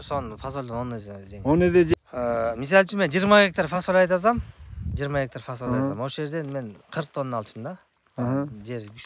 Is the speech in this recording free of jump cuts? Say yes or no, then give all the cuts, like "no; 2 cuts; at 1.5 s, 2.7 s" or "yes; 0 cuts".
no; 1 cut; at 1.9 s